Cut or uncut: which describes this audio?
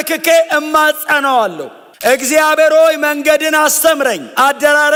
uncut